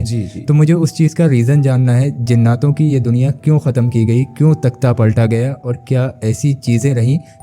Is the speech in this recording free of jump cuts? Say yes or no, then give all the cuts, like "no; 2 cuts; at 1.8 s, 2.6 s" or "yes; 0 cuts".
yes; 0 cuts